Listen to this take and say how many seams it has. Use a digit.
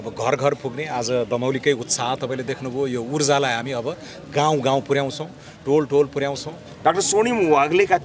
1